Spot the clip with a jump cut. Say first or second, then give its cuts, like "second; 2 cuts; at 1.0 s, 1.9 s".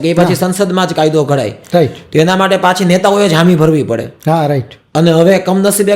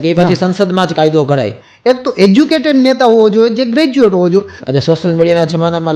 second; 2 cuts; at 1.6 s, 4.6 s